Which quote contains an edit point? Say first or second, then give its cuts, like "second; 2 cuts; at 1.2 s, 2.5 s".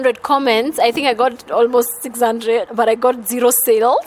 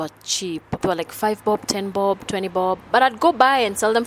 first; 1 cut; at 2.7 s